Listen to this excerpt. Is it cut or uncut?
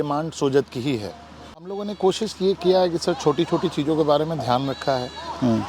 cut